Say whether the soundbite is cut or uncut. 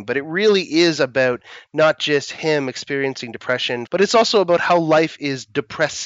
cut